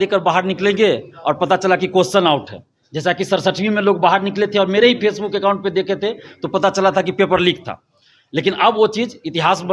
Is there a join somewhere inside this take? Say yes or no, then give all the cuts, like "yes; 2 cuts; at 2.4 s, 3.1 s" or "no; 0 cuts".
no; 0 cuts